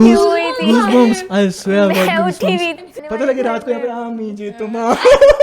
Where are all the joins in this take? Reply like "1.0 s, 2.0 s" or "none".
2.7 s